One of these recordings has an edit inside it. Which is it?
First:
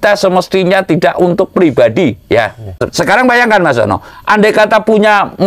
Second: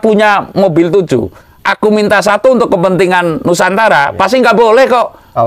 first; 1 cut; at 2.8 s

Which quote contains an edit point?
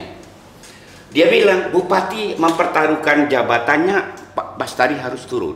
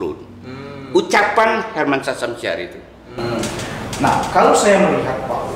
second; 1 cut; at 3.1 s

